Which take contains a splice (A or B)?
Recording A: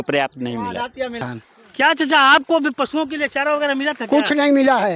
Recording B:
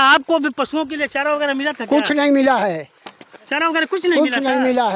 A